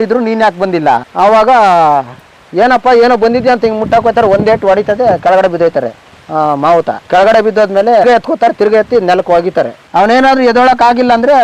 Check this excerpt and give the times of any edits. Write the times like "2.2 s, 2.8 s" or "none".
1.1 s, 9.9 s

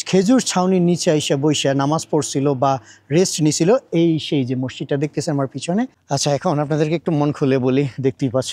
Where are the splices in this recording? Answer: 6.0 s

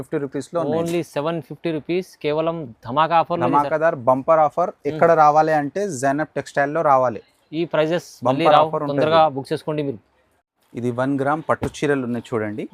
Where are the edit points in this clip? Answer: none

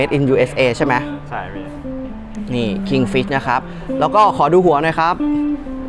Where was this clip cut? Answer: none

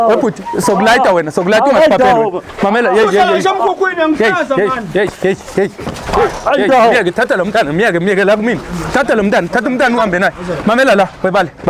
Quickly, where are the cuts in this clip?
none

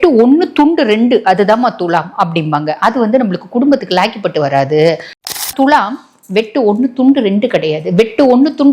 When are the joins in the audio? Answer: 5.2 s

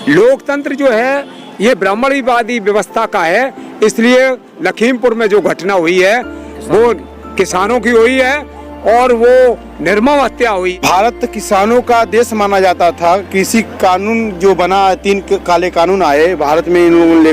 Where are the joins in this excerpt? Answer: 10.7 s

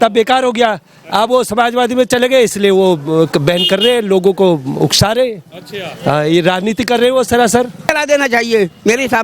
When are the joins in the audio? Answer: 7.9 s

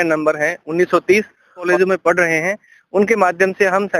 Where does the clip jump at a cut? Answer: 1.7 s

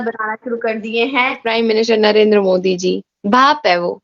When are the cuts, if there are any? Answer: 1.5 s

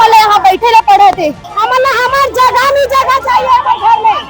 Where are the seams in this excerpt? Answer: 1.5 s

